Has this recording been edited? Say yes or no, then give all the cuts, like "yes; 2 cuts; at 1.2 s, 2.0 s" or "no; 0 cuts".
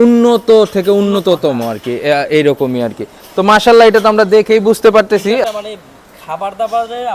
yes; 1 cut; at 5.4 s